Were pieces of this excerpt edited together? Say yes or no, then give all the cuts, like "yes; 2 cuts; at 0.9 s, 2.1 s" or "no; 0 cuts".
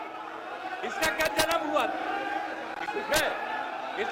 no; 0 cuts